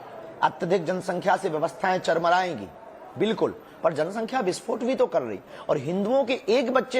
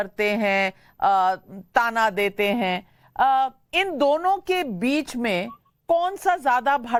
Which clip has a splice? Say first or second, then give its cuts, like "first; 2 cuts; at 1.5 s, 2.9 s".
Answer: first; 1 cut; at 1.5 s